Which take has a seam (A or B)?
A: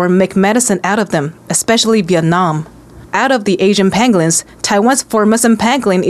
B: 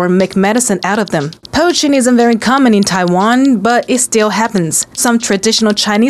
B